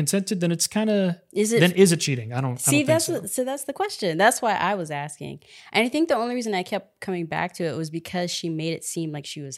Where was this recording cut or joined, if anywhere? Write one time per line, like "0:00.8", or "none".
none